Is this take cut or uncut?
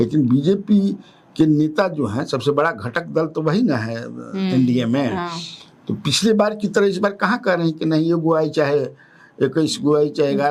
uncut